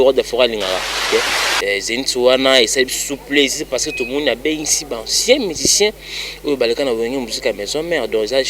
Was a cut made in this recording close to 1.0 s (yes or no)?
yes